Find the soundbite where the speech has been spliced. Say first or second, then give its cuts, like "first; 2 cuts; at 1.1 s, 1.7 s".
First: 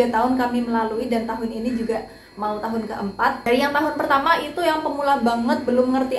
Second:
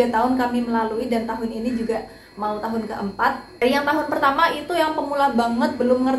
first; 1 cut; at 3.4 s